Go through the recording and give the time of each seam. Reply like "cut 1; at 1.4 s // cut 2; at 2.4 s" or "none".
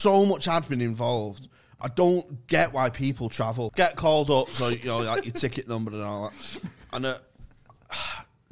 cut 1; at 3.6 s